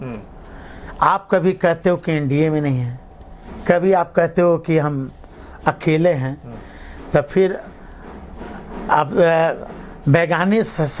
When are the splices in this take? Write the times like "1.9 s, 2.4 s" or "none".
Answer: none